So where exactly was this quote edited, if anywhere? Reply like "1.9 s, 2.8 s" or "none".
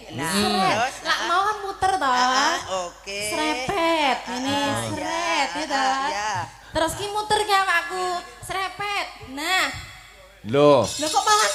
none

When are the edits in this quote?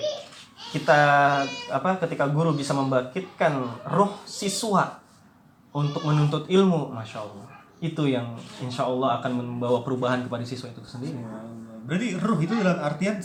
none

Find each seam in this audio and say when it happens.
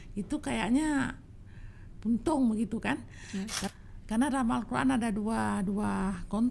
3.6 s

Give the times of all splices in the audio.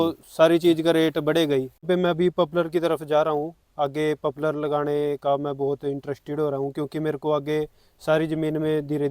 1.8 s

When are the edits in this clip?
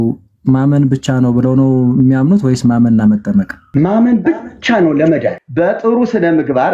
3.6 s, 5.4 s

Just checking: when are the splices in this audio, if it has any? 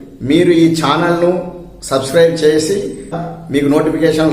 3.2 s

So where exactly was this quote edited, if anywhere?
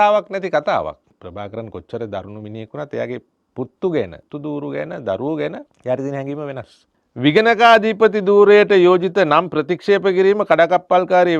1.1 s, 3.4 s, 4.2 s, 5.7 s, 7.1 s

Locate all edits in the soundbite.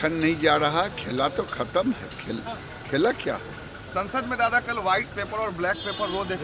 none

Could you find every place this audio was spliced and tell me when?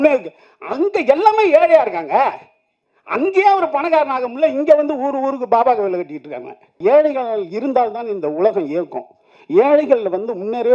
6.8 s

